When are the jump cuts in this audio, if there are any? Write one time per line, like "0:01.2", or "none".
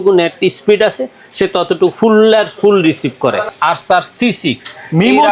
0:03.5